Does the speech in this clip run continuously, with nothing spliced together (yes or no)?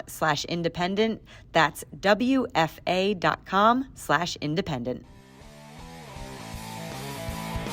no